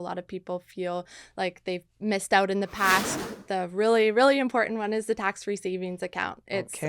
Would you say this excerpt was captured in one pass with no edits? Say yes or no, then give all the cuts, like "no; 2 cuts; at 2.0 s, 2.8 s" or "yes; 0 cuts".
no; 1 cut; at 3.1 s